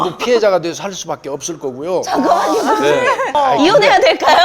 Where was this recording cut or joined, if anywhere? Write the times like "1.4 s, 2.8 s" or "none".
3.4 s